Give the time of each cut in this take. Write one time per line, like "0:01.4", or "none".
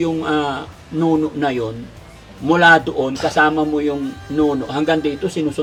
none